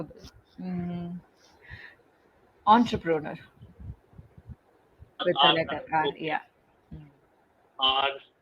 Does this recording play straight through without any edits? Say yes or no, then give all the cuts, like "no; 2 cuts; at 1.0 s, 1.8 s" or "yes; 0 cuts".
no; 1 cut; at 5.2 s